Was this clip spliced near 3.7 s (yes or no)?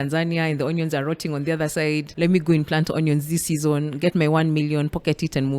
no